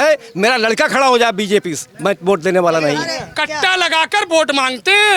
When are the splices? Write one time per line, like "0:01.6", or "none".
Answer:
0:03.3